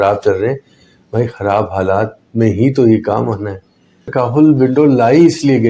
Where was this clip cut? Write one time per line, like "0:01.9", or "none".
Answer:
0:04.0